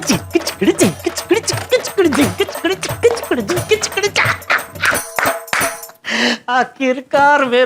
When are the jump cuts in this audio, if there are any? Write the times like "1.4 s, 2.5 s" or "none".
none